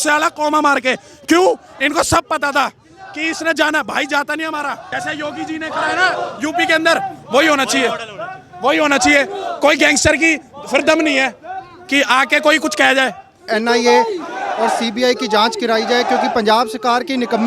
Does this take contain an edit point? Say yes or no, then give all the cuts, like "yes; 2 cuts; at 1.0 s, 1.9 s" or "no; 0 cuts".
yes; 2 cuts; at 4.9 s, 13.5 s